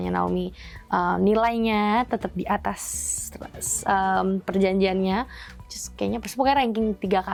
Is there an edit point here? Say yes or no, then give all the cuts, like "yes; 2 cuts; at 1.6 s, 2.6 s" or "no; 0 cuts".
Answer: no; 0 cuts